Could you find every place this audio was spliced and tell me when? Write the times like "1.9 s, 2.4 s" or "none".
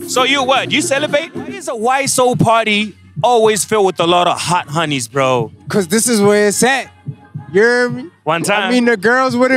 1.7 s, 5.6 s